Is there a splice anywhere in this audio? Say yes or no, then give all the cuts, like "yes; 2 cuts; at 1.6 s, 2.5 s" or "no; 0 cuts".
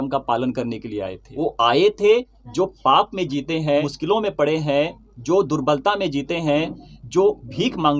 yes; 2 cuts; at 1.2 s, 3.9 s